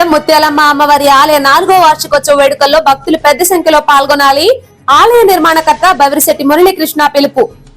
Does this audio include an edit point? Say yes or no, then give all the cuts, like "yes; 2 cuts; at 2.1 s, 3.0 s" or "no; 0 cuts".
no; 0 cuts